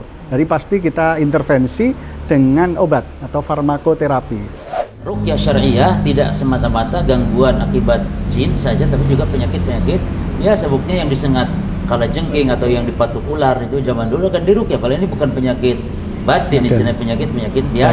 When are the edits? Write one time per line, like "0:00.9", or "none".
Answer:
0:04.9